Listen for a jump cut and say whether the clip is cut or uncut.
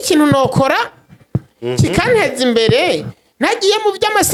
uncut